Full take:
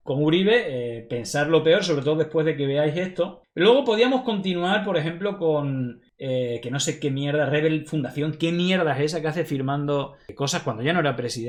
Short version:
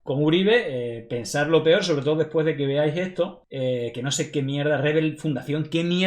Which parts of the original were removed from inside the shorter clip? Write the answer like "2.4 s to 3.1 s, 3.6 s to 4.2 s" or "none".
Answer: 3.4 s to 6.1 s